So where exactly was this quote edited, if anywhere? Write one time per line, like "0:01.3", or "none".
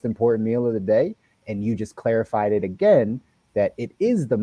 none